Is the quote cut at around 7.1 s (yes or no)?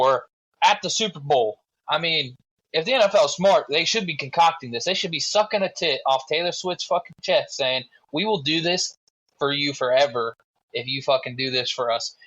no